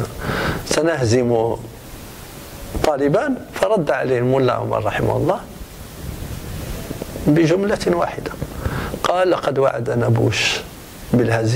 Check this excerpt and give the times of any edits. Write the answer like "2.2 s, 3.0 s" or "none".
none